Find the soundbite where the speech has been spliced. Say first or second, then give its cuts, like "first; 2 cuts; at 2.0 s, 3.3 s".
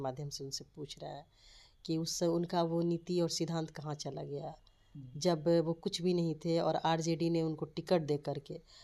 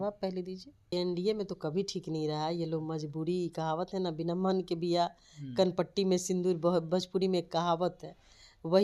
second; 1 cut; at 0.9 s